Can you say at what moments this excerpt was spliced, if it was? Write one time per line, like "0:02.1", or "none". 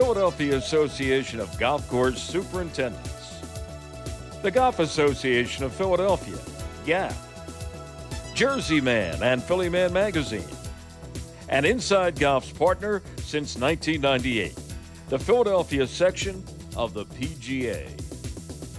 0:17.9